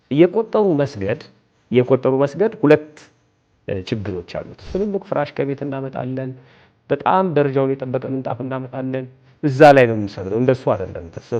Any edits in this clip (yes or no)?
yes